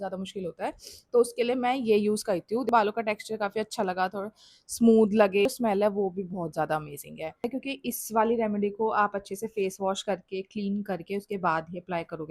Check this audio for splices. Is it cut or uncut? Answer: cut